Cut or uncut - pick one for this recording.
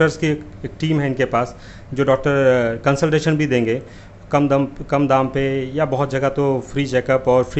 uncut